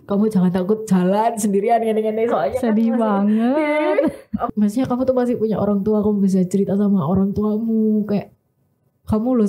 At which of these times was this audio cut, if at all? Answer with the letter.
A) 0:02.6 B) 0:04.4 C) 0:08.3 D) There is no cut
B